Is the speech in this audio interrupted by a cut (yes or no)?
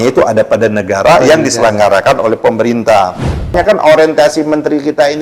yes